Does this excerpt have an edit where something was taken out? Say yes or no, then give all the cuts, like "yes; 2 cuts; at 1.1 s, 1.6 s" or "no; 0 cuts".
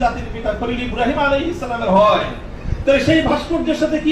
no; 0 cuts